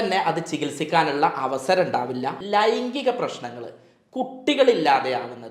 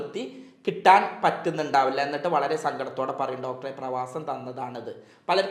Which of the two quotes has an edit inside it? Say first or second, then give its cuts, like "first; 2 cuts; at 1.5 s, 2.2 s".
first; 1 cut; at 2.4 s